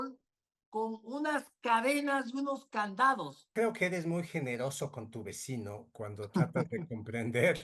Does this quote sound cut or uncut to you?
cut